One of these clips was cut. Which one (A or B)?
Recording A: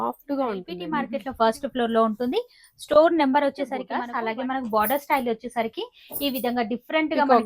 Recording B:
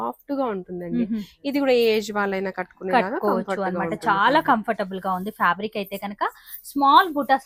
A